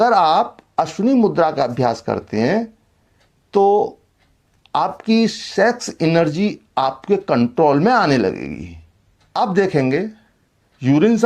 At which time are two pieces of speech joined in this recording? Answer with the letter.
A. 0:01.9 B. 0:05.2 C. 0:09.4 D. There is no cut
C